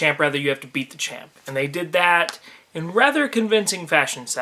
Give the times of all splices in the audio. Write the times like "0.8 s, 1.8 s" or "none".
none